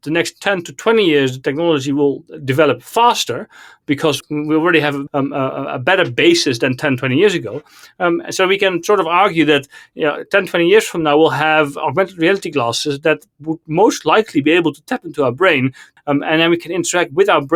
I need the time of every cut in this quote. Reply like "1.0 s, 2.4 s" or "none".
none